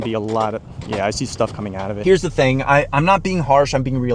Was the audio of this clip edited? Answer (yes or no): yes